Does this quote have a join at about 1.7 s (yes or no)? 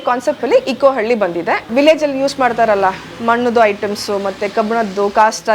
yes